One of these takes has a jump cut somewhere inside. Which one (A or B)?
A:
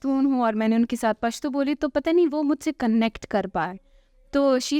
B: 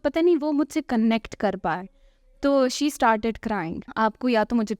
B